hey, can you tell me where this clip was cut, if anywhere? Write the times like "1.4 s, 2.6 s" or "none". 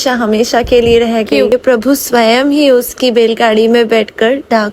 1.5 s